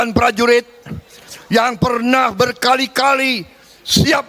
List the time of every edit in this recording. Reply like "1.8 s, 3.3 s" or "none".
none